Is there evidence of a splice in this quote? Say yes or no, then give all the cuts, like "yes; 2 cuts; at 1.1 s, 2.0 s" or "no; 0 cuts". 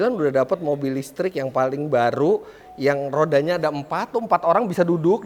no; 0 cuts